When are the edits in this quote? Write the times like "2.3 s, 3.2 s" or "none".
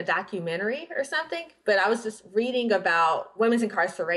3.3 s